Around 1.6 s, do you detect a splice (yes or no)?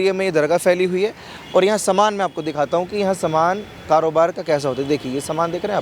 no